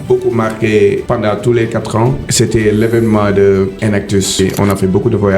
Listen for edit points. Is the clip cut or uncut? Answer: cut